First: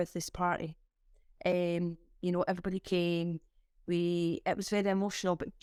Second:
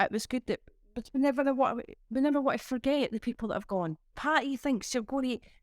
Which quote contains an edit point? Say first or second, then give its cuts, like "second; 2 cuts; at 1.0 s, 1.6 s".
second; 1 cut; at 4.1 s